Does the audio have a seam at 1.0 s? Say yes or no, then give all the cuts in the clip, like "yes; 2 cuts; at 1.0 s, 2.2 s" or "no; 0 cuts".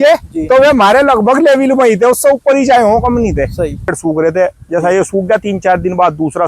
no; 1 cut; at 4.0 s